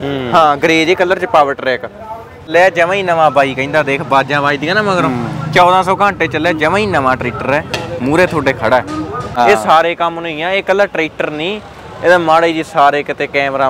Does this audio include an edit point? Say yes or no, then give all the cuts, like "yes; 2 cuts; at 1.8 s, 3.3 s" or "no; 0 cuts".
yes; 2 cuts; at 2.5 s, 9.2 s